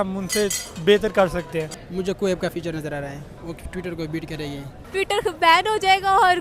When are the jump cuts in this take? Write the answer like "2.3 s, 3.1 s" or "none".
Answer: 1.7 s, 4.8 s